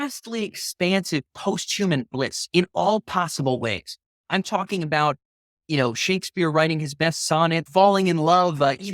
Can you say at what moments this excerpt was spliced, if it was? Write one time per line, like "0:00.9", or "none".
0:07.7